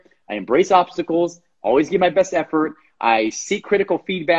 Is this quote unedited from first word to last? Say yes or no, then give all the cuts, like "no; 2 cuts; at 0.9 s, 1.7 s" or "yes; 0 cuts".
yes; 0 cuts